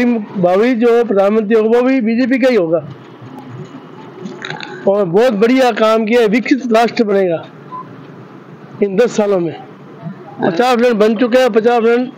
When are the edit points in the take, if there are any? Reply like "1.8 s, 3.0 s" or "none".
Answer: none